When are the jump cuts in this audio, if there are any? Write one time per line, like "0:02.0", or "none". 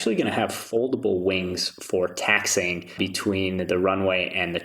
0:02.9